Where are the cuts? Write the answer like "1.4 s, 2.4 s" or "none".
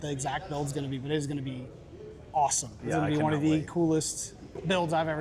none